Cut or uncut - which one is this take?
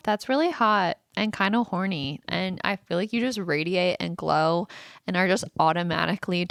uncut